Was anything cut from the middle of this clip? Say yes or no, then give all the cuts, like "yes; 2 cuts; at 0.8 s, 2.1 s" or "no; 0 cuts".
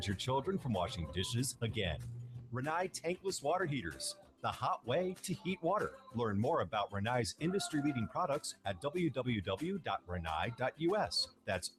no; 0 cuts